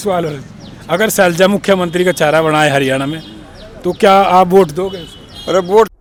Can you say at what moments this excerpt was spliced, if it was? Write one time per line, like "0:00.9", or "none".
none